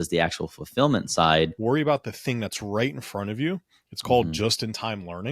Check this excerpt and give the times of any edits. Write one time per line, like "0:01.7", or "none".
0:01.6